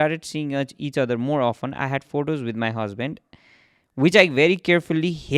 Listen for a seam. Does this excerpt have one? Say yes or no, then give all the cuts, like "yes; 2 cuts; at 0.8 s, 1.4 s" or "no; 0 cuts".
no; 0 cuts